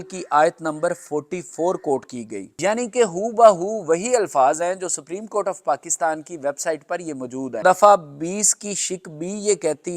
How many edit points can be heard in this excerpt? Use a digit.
2